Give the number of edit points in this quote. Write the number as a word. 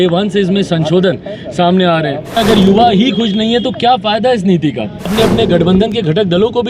two